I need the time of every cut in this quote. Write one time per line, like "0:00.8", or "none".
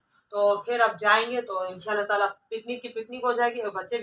none